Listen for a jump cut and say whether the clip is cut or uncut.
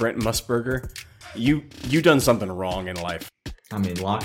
cut